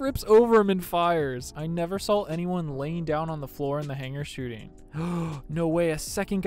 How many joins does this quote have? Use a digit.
2